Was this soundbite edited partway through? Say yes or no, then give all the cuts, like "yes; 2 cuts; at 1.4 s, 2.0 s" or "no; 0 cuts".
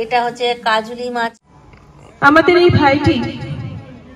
yes; 1 cut; at 1.4 s